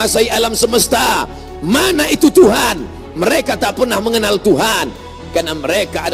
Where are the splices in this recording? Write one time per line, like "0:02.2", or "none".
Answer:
none